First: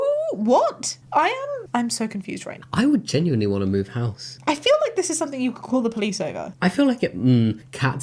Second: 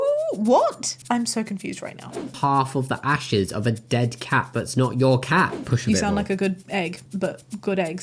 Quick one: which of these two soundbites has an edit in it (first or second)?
second